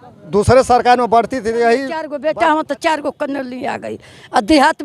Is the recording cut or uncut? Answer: cut